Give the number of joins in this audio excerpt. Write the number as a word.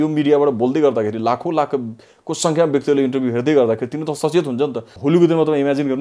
one